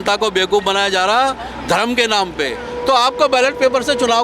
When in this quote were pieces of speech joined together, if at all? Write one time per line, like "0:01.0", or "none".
0:02.7